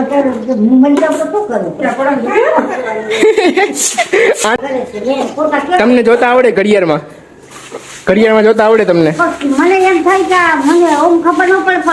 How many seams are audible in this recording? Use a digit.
1